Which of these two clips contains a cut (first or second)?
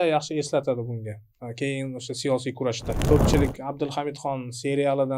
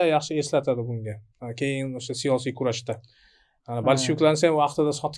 first